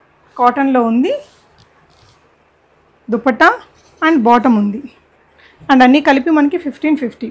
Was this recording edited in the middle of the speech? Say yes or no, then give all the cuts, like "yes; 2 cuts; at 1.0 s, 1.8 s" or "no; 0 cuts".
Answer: no; 0 cuts